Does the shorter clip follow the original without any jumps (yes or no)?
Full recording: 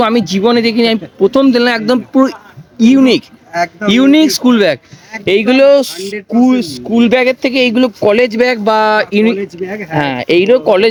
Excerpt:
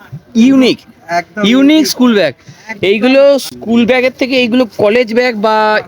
no